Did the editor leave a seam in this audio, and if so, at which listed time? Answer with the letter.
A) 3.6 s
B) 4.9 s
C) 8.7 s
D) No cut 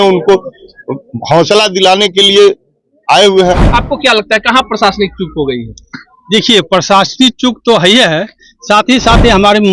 A